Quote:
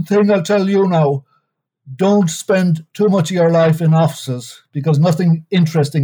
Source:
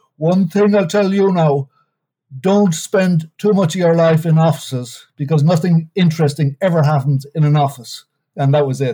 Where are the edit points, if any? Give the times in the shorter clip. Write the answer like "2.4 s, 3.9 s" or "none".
none